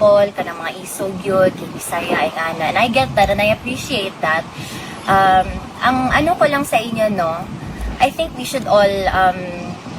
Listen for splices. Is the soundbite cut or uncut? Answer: uncut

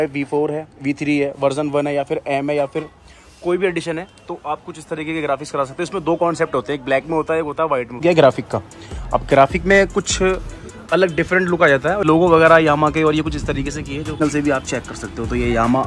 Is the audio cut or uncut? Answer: cut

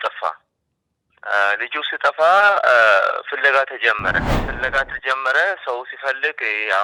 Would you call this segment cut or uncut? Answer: cut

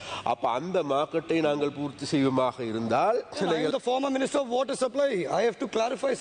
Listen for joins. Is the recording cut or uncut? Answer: cut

